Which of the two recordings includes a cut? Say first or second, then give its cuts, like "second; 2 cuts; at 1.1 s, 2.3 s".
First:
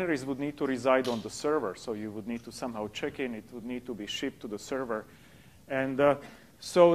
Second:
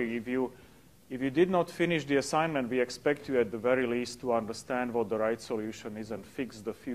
second; 1 cut; at 4.9 s